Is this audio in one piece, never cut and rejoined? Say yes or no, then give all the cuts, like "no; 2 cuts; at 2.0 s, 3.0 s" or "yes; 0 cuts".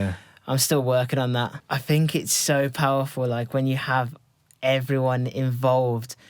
no; 1 cut; at 1.6 s